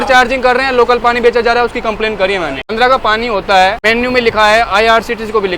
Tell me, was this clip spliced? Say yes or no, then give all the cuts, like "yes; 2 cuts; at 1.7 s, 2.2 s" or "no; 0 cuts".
yes; 1 cut; at 3.8 s